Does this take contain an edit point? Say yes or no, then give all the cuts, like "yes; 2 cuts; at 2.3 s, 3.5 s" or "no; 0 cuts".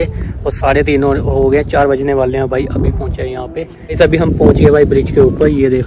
yes; 1 cut; at 4.0 s